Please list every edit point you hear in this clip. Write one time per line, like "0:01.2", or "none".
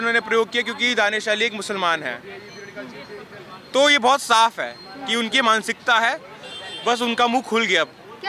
none